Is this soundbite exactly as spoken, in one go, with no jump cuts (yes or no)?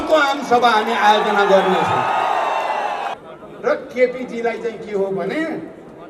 no